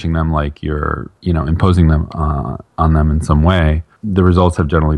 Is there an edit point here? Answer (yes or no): no